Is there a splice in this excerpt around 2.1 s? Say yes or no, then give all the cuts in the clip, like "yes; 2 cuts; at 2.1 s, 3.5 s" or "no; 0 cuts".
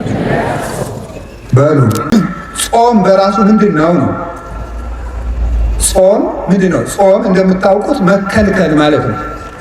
yes; 1 cut; at 2.1 s